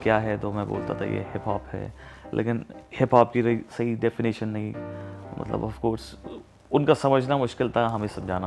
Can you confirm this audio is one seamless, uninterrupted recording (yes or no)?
yes